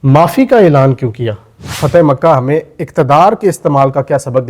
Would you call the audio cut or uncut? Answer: cut